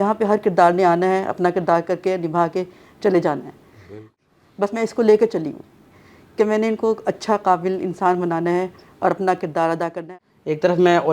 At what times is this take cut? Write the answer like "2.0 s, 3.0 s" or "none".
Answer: 4.2 s, 10.0 s